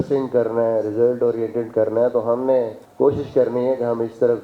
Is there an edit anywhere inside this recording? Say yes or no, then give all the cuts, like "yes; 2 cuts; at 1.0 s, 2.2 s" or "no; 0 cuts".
yes; 1 cut; at 2.8 s